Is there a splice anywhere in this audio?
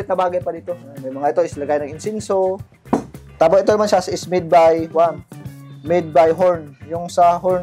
yes; 1 cut; at 3.2 s

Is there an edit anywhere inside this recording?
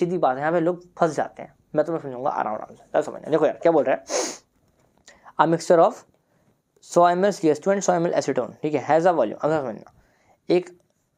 no; 0 cuts

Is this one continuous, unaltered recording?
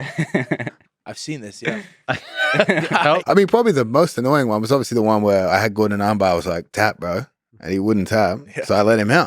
no; 1 cut; at 3.2 s

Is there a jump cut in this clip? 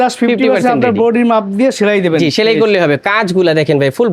no; 0 cuts

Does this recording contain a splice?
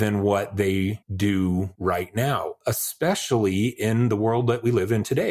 yes; 2 cuts; at 1.0 s, 1.7 s

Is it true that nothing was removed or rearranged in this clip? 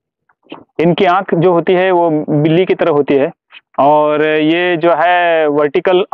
yes; 0 cuts

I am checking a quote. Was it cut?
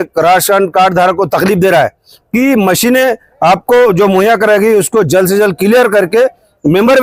yes; 1 cut; at 2.1 s

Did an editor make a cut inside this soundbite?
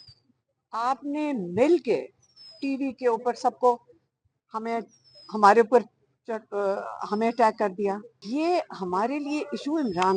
yes; 1 cut; at 8.1 s

